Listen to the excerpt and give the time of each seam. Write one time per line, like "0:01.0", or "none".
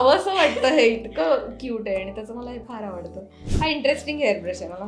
0:03.4